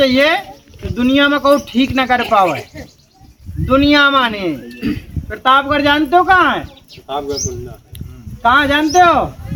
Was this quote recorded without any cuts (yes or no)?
yes